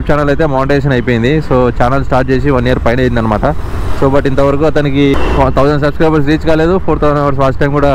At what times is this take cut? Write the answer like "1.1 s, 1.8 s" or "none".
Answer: 5.1 s

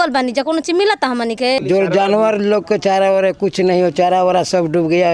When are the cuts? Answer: 1.6 s

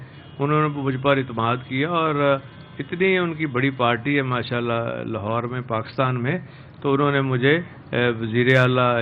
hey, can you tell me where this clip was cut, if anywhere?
none

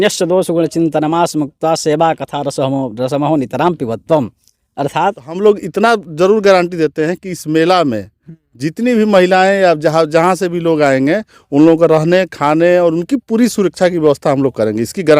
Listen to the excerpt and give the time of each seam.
5.3 s

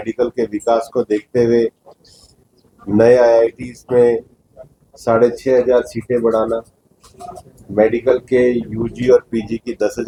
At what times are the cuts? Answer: none

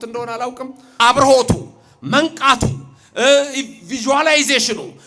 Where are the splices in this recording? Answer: 1.0 s

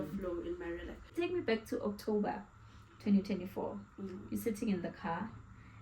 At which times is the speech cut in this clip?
1.0 s

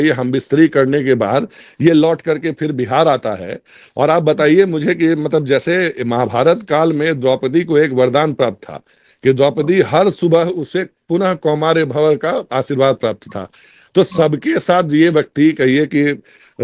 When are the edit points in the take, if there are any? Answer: none

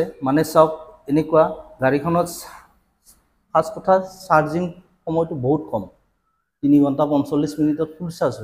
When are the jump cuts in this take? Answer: none

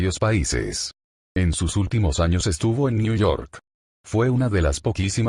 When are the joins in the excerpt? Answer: none

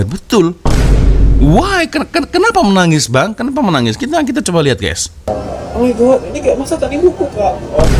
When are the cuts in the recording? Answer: none

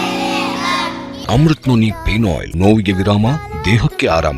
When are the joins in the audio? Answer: 1.2 s, 2.5 s

